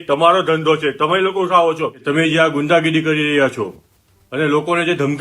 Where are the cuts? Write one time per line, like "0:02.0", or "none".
0:02.0